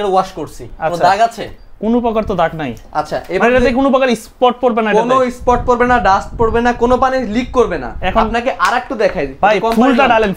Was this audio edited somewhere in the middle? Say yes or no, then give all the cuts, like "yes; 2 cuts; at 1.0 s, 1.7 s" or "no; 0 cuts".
no; 0 cuts